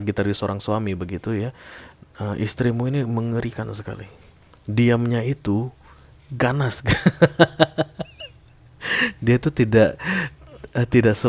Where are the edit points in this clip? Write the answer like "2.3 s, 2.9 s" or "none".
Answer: none